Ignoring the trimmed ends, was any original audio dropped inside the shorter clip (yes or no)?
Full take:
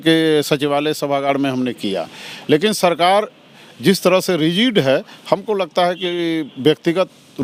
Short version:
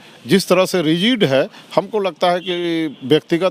no